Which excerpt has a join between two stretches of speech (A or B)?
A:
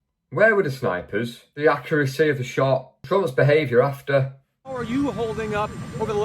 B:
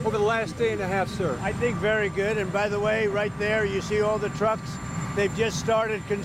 A